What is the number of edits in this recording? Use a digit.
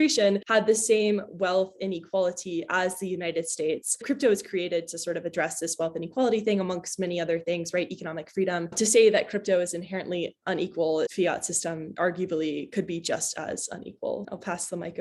0